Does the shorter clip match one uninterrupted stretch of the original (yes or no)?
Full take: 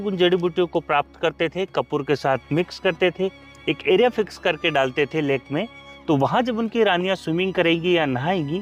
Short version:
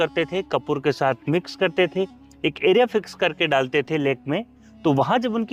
yes